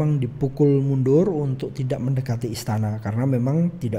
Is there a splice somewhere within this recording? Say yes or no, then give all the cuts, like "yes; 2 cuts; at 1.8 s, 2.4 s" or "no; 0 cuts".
no; 0 cuts